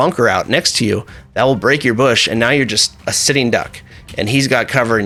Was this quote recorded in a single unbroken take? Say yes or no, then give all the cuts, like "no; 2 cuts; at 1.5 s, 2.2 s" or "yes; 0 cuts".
yes; 0 cuts